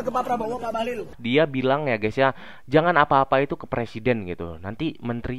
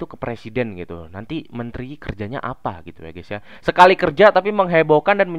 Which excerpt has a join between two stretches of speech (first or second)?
first